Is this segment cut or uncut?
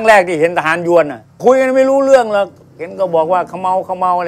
uncut